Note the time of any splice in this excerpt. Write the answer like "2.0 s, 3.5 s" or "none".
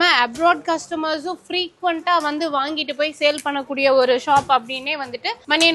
none